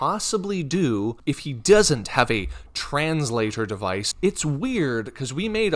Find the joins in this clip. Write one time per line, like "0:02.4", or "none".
0:01.2
0:04.1

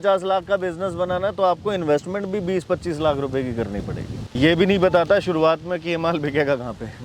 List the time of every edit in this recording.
0:04.3

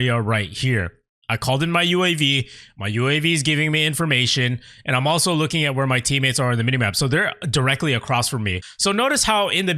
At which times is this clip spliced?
0:08.7

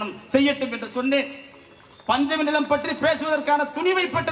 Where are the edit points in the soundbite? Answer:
none

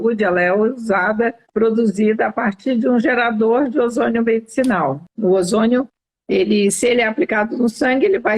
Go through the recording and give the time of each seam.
0:01.4
0:05.1

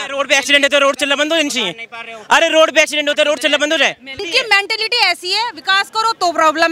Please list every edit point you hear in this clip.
0:04.2

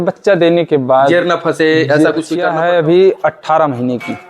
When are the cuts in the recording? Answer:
0:02.5

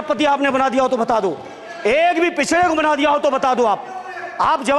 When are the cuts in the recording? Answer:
none

